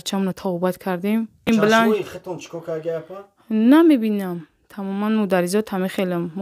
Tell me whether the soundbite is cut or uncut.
cut